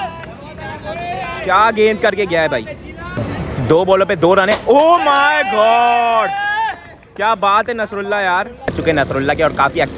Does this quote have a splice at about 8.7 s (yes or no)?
yes